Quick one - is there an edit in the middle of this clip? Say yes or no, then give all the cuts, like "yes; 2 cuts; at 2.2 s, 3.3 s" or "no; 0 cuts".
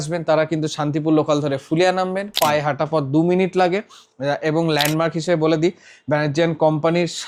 no; 0 cuts